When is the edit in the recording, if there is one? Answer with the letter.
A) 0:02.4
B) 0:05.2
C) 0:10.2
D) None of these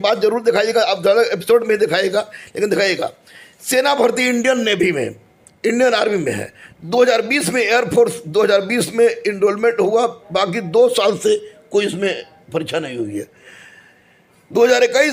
D